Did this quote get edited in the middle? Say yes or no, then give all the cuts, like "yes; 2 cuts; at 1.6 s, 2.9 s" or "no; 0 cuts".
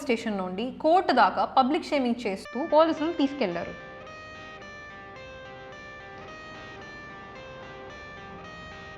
yes; 1 cut; at 3.7 s